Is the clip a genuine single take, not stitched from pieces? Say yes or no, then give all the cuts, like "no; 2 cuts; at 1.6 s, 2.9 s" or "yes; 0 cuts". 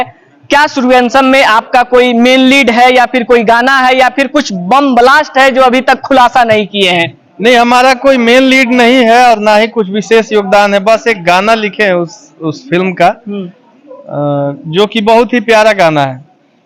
yes; 0 cuts